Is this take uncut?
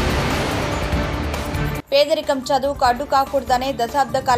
no; 1 cut; at 1.6 s

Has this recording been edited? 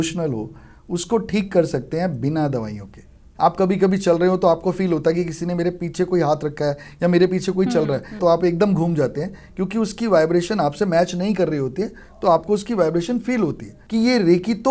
yes; 3 cuts; at 3.3 s, 8.2 s, 13.8 s

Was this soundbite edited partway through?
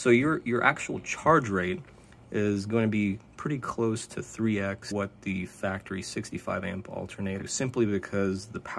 yes; 2 cuts; at 4.9 s, 7.4 s

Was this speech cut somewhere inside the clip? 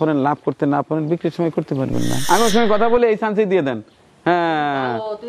yes; 1 cut; at 2.2 s

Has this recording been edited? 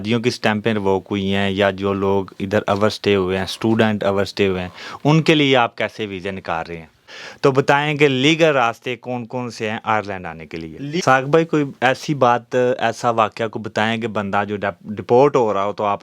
yes; 2 cuts; at 7.0 s, 11.0 s

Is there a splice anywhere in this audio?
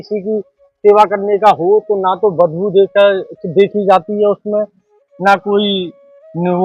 no; 0 cuts

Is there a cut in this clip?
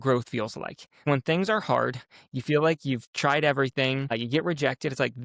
yes; 2 cuts; at 1.0 s, 4.1 s

